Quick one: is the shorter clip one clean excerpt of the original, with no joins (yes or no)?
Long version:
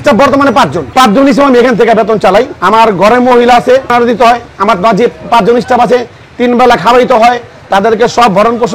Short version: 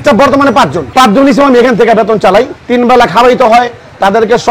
no